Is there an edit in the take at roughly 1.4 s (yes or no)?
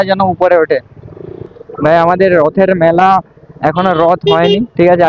yes